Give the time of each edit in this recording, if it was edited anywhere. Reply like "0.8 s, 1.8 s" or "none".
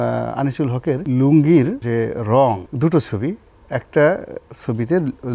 1.0 s, 1.8 s, 2.7 s